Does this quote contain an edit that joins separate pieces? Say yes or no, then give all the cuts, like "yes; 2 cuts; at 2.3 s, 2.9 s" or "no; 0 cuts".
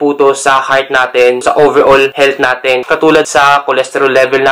yes; 1 cut; at 3.3 s